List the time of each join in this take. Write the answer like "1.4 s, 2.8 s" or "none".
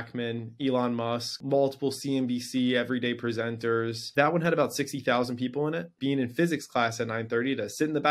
1.4 s, 4.0 s, 5.9 s

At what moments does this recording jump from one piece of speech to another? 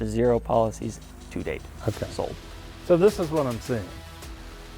none

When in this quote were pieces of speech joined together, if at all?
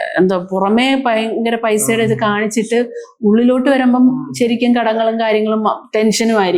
none

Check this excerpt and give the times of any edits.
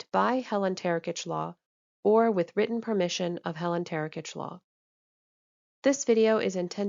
none

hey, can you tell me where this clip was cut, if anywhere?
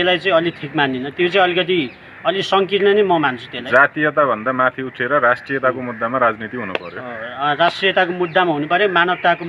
none

